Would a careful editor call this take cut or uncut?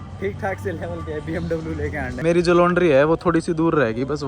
cut